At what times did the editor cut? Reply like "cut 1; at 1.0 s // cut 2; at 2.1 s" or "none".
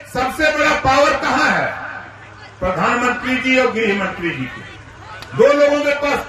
none